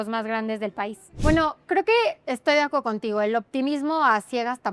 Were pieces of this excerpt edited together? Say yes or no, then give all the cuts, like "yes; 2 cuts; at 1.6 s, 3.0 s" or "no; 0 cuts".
yes; 1 cut; at 1.0 s